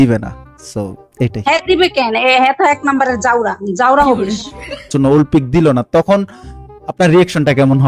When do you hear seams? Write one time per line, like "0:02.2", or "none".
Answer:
0:04.9